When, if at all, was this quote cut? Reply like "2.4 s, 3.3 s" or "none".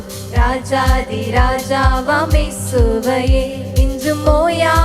none

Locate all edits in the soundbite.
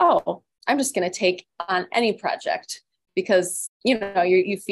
3.6 s

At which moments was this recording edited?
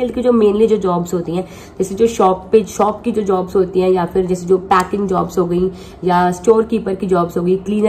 none

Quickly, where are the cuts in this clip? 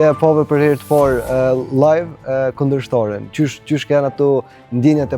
none

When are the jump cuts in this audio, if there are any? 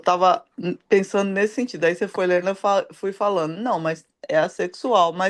none

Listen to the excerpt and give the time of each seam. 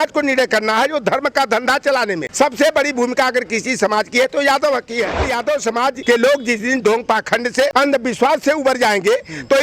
2.3 s, 5.6 s, 7.7 s

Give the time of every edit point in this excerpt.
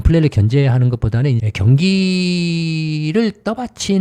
1.4 s

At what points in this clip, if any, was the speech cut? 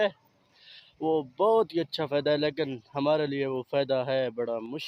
none

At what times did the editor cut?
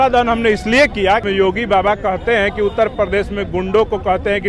1.2 s

